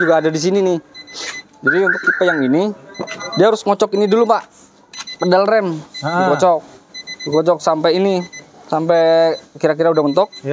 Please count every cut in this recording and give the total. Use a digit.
0